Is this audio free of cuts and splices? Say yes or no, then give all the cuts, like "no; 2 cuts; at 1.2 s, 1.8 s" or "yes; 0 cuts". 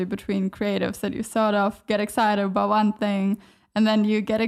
yes; 0 cuts